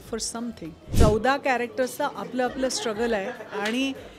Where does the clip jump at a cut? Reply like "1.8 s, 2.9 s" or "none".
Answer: 0.9 s